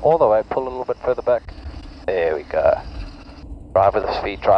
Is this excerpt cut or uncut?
uncut